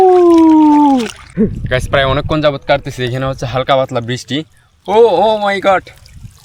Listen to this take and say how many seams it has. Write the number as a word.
one